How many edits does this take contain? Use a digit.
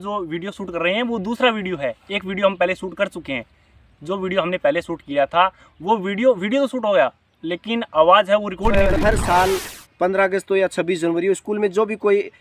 1